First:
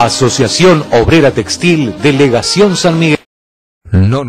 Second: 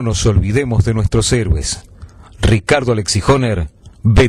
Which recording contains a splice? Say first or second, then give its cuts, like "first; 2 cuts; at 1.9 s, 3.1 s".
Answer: first; 1 cut; at 3.1 s